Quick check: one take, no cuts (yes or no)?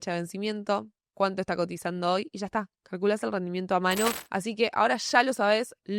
no